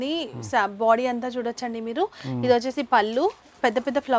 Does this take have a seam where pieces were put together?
no; 0 cuts

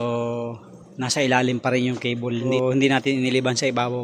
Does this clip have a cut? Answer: yes; 1 cut; at 2.5 s

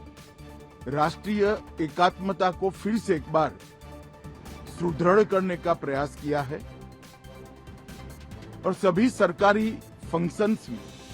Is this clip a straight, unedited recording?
yes; 0 cuts

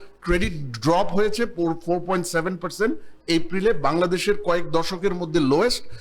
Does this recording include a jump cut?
no; 0 cuts

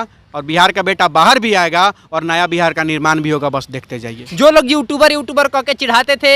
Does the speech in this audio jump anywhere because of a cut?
no; 0 cuts

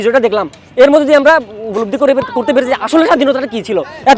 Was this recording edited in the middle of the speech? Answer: no; 0 cuts

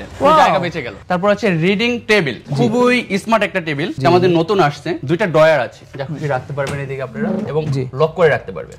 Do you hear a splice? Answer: yes; 2 cuts; at 1.0 s, 2.4 s

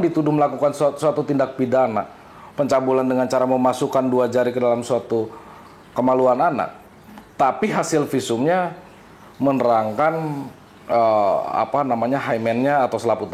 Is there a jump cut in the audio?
no; 0 cuts

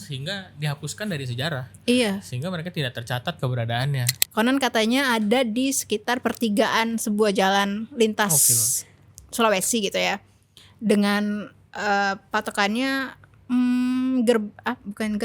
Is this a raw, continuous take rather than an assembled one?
no; 1 cut; at 4.2 s

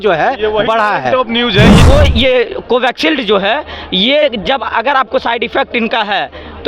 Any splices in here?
yes; 1 cut; at 1.7 s

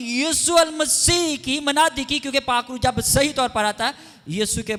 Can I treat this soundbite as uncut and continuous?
yes; 0 cuts

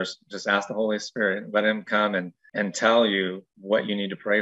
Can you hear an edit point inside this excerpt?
yes; 2 cuts; at 2.4 s, 3.5 s

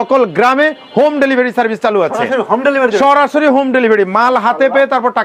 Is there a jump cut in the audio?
no; 0 cuts

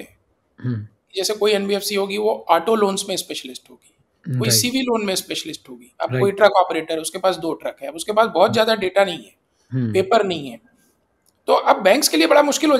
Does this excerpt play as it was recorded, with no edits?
no; 1 cut; at 5.8 s

